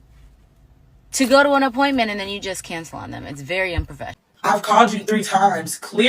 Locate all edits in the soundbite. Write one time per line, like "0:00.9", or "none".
0:04.2